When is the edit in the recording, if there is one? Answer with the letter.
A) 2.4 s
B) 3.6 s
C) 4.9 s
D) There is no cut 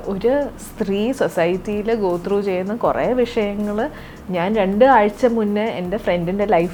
D